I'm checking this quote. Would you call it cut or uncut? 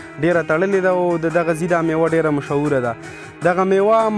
uncut